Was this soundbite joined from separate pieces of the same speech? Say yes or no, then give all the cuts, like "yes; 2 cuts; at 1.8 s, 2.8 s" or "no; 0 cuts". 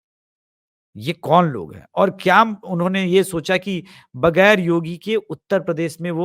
no; 0 cuts